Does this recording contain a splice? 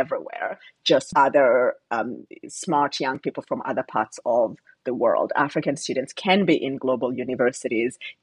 yes; 1 cut; at 1.1 s

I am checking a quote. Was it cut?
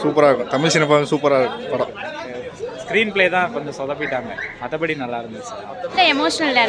yes; 2 cuts; at 2.4 s, 5.9 s

